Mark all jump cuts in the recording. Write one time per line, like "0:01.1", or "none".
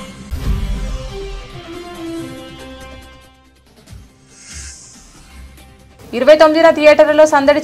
0:02.8
0:06.0